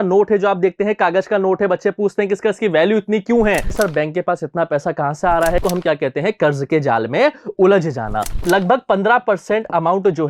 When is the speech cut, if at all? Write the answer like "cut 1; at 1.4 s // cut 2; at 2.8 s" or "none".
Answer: cut 1; at 3.7 s // cut 2; at 5.6 s // cut 3; at 8.3 s